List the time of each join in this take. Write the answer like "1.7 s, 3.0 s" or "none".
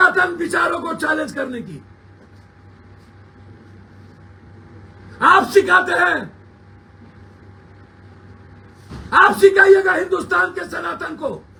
none